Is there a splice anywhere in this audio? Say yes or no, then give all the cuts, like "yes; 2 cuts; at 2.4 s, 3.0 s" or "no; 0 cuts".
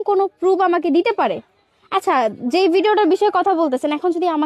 no; 0 cuts